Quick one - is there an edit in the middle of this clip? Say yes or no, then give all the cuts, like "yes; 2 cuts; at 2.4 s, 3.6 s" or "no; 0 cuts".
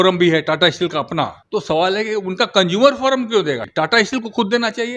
yes; 2 cuts; at 1.4 s, 3.6 s